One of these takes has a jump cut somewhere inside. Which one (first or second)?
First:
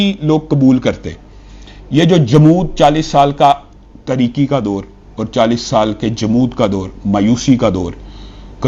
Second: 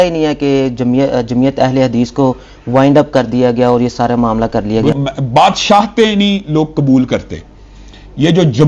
second